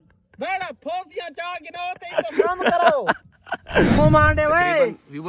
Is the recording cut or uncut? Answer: cut